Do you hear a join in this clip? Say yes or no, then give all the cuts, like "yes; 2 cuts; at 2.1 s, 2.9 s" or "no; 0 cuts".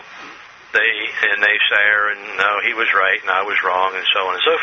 yes; 1 cut; at 1.3 s